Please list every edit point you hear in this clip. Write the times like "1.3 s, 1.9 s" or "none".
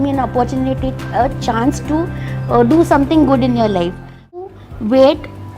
4.5 s